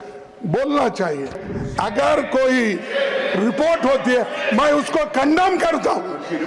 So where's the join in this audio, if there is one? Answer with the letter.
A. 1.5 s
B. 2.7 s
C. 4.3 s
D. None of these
A